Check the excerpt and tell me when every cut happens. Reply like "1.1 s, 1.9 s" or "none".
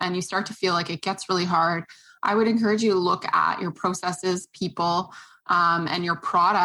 none